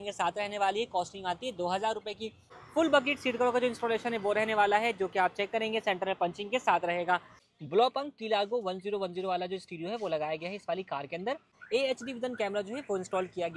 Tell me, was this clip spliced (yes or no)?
yes